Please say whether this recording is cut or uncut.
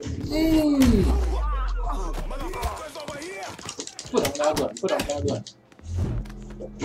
uncut